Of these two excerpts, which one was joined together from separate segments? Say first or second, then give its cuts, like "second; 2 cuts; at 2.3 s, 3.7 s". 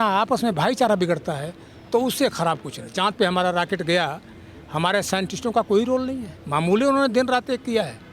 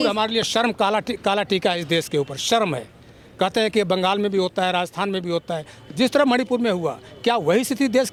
first; 2 cuts; at 2.8 s, 6.3 s